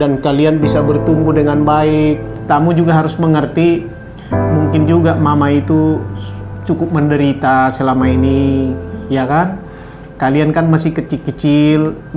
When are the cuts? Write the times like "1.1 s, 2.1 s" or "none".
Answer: 2.3 s